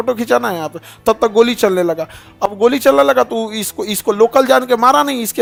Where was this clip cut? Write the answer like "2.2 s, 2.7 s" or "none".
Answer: none

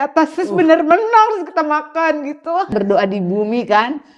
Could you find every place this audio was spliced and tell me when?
2.7 s

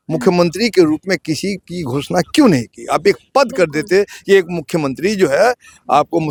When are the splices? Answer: none

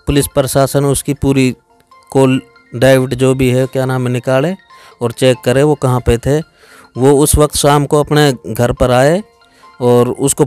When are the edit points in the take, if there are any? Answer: none

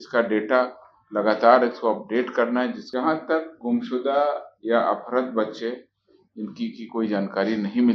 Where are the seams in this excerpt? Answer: 2.8 s

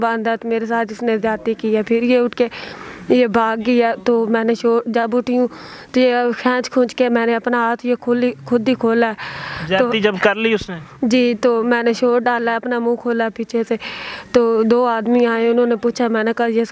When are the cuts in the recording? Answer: none

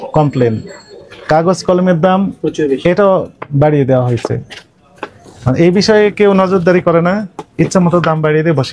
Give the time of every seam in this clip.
none

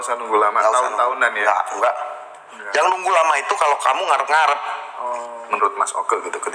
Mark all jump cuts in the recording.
5.5 s

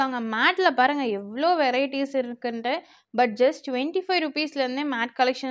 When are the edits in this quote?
none

